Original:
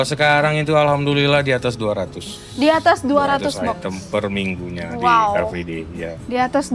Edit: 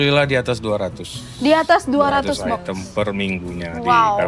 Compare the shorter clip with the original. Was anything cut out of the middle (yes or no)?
no